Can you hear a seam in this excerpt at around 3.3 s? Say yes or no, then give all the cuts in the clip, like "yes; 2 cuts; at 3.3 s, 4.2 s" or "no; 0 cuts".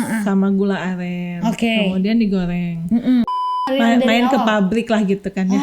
yes; 1 cut; at 3.3 s